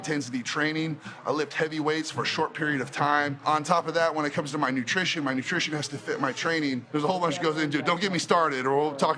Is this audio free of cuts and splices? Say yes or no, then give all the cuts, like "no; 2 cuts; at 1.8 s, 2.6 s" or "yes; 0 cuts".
yes; 0 cuts